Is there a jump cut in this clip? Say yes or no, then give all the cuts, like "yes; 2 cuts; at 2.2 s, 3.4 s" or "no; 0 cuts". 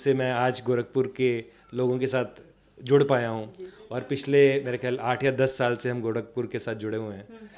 no; 0 cuts